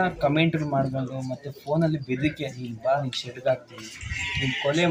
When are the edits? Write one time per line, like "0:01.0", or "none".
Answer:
none